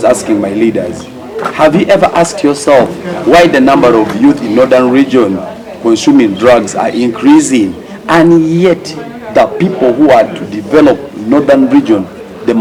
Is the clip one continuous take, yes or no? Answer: yes